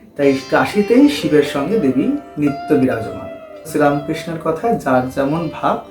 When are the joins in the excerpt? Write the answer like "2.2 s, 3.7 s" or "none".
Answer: 3.7 s